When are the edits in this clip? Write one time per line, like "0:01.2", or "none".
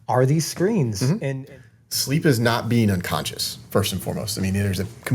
0:01.2